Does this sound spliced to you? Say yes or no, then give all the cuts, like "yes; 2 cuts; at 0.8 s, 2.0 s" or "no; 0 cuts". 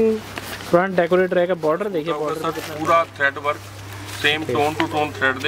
yes; 1 cut; at 2.5 s